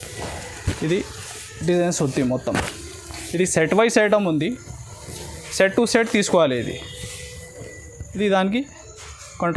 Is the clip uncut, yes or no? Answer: yes